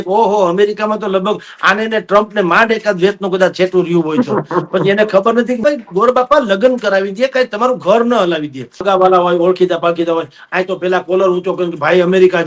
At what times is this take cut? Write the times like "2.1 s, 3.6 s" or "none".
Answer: 5.6 s, 8.8 s